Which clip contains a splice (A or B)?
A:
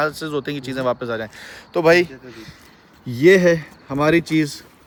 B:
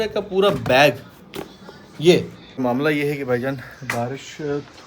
B